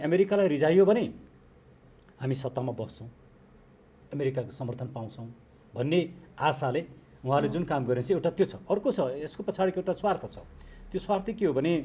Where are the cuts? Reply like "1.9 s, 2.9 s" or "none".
none